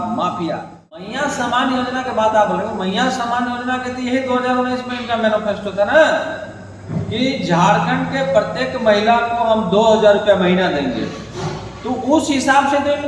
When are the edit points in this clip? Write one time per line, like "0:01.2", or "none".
0:01.0